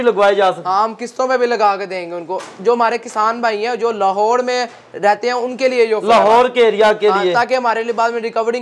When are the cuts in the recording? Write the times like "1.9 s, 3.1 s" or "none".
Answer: none